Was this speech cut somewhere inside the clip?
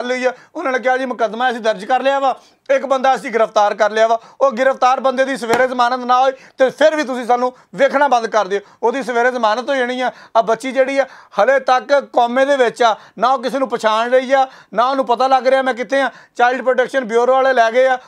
no; 0 cuts

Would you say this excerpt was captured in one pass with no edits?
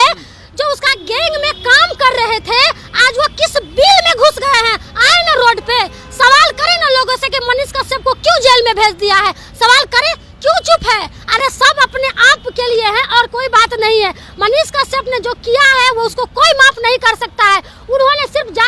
yes; 0 cuts

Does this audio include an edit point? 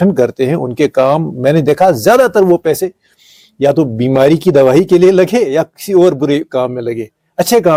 no; 0 cuts

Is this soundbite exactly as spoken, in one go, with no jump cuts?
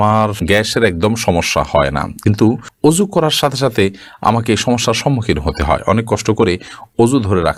yes; 0 cuts

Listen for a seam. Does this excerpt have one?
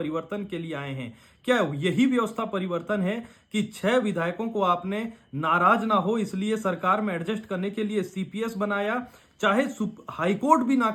no; 0 cuts

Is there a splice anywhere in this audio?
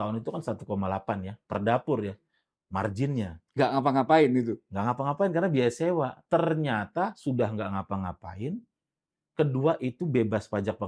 no; 0 cuts

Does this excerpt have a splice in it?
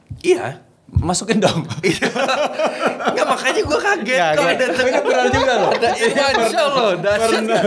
no; 0 cuts

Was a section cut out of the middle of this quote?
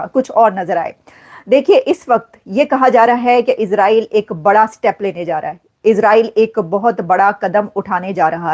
no; 0 cuts

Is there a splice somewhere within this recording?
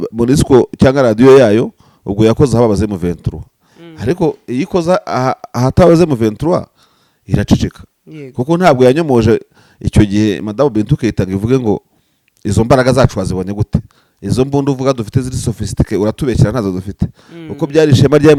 no; 0 cuts

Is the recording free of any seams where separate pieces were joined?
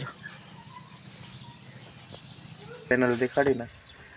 no; 1 cut; at 2.9 s

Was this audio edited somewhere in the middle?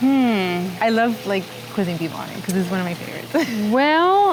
no; 0 cuts

